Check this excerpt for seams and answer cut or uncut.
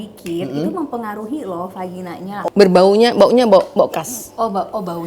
cut